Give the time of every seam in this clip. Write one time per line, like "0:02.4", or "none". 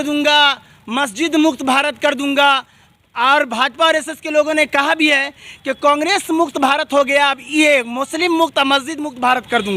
none